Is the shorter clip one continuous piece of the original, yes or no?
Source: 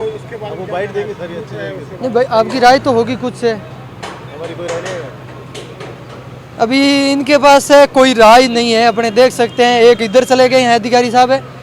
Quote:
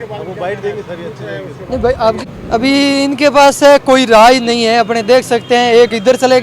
no